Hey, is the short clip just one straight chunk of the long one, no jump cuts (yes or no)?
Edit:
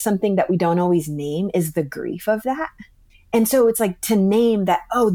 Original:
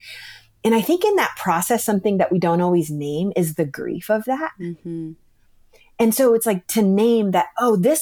no